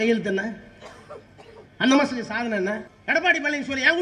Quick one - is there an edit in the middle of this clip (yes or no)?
yes